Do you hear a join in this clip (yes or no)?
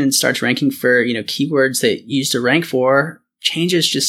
no